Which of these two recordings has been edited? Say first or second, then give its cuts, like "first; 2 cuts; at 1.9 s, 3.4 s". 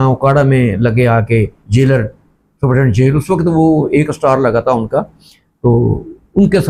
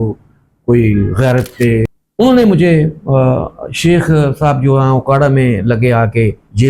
second; 1 cut; at 2.0 s